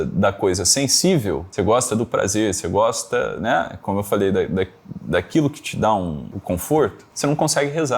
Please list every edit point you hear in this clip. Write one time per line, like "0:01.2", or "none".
0:01.5
0:06.3
0:07.0